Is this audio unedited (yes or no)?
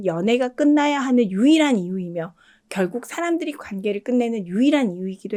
yes